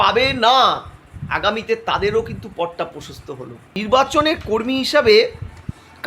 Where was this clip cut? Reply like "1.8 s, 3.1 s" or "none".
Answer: 3.8 s